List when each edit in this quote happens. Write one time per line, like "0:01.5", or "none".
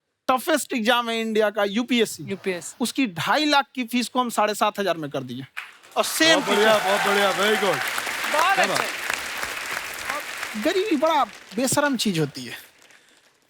0:10.4